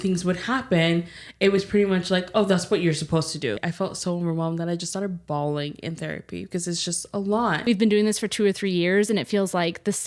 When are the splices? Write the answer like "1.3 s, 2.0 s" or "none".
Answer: 3.6 s, 7.6 s